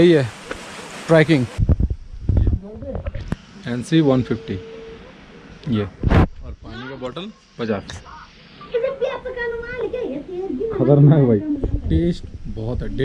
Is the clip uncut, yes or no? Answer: no